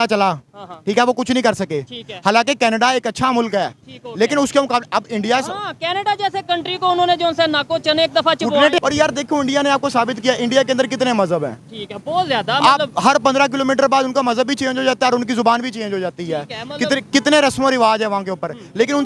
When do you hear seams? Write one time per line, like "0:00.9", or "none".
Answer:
0:08.8